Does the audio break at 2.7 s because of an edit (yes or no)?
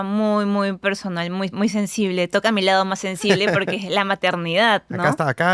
no